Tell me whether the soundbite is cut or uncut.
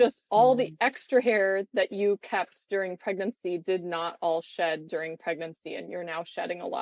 uncut